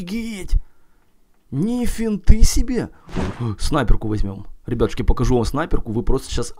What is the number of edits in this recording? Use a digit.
1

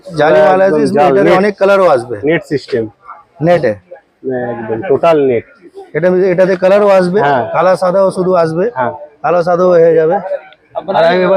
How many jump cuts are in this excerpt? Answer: 0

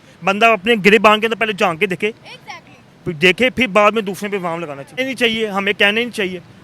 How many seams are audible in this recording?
1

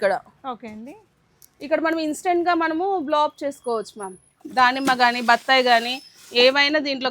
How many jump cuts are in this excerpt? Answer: 1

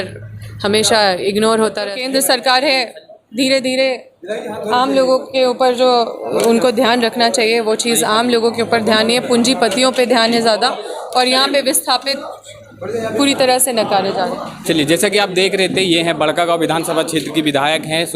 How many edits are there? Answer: 1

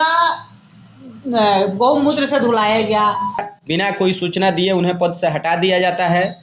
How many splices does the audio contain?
1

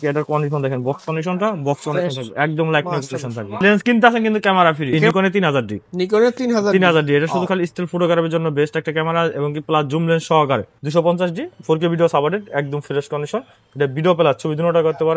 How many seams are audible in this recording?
3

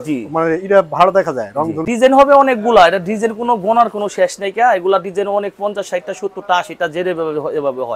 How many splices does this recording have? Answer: 1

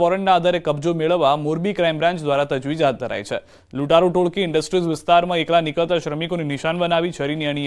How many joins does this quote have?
1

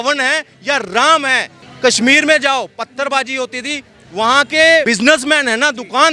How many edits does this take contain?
1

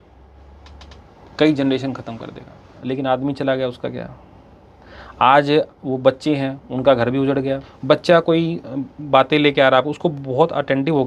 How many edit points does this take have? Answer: 2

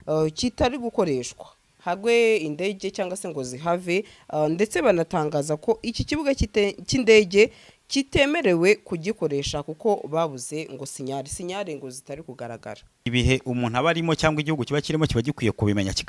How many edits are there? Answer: 1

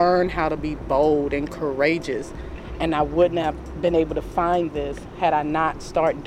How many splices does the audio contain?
1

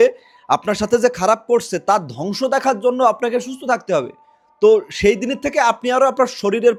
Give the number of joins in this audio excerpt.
0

